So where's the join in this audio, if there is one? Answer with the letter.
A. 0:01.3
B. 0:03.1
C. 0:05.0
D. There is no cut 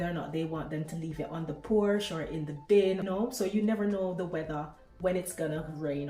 B